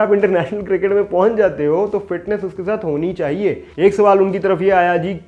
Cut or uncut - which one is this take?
cut